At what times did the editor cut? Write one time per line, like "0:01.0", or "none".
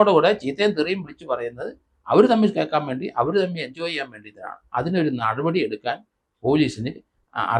none